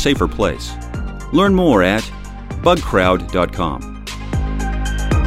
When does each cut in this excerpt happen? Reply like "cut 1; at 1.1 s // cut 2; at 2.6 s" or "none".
cut 1; at 4.0 s